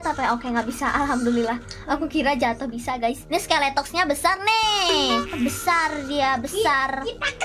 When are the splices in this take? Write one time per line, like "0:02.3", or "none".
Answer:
0:05.3